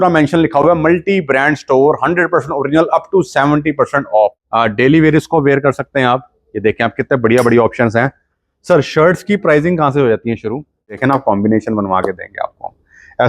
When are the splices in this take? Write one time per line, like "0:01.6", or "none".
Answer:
0:04.4
0:11.0